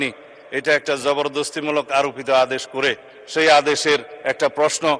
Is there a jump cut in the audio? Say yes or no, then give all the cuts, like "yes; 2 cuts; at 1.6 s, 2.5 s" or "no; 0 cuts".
no; 0 cuts